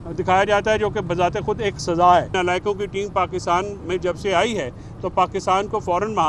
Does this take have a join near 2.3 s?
yes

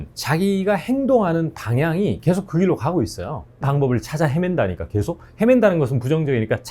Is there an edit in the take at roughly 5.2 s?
no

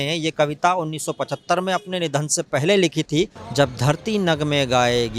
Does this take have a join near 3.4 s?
yes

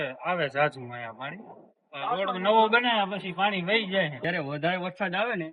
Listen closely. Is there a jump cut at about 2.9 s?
no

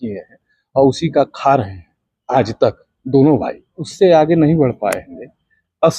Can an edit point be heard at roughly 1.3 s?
no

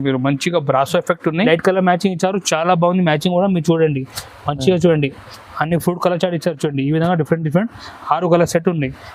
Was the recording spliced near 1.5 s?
yes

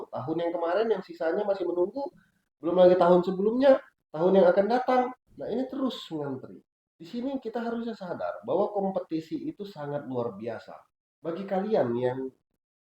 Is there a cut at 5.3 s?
no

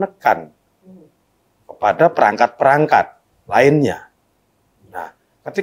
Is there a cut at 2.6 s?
no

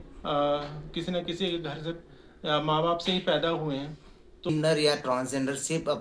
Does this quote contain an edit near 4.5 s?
yes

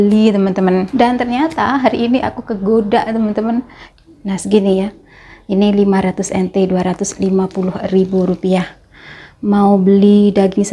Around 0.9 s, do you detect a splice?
yes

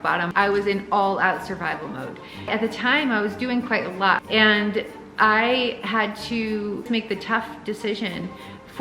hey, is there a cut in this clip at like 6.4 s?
no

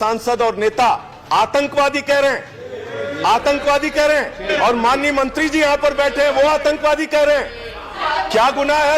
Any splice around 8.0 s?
yes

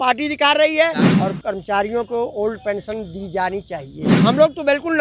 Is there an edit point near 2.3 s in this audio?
no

